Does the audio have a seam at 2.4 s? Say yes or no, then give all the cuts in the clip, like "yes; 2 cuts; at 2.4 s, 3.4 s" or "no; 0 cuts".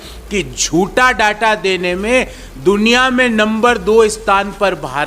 no; 0 cuts